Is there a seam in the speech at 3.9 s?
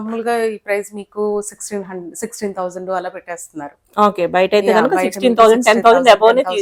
no; 0 cuts

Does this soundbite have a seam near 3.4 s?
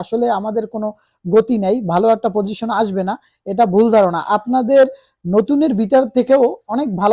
no; 0 cuts

